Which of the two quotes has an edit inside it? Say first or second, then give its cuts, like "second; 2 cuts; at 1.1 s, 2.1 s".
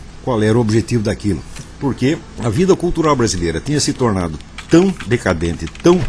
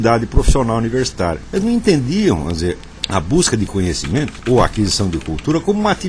second; 1 cut; at 4.3 s